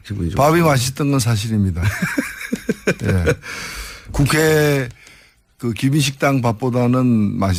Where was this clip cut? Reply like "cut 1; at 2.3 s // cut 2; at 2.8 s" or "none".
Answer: none